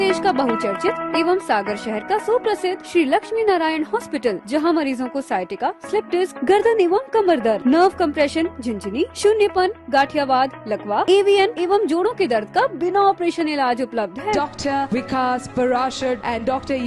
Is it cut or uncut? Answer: uncut